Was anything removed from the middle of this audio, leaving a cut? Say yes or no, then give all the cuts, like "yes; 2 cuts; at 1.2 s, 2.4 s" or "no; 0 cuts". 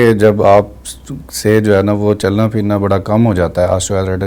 no; 0 cuts